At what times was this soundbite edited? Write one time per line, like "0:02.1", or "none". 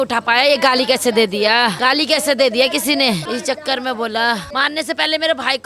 0:01.8
0:03.2
0:04.5